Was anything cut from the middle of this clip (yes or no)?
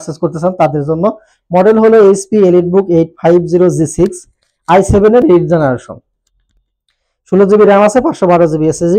no